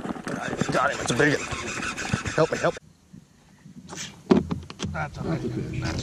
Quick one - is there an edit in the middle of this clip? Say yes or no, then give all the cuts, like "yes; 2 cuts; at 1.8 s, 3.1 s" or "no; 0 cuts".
yes; 1 cut; at 2.7 s